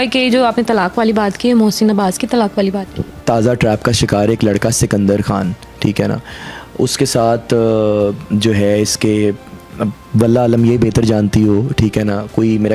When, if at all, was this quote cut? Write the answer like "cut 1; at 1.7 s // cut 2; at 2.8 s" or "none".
cut 1; at 3.1 s